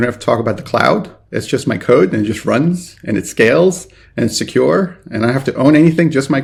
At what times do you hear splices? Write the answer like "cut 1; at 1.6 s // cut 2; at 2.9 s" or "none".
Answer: none

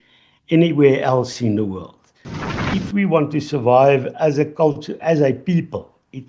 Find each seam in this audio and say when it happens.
cut 1; at 2.5 s

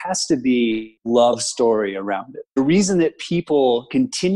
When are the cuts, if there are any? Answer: cut 1; at 0.9 s // cut 2; at 2.6 s

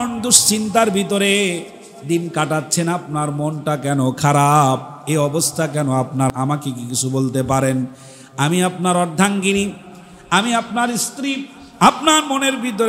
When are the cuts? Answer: cut 1; at 6.3 s

